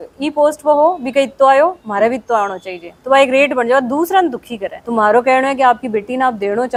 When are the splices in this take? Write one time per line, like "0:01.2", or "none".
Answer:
none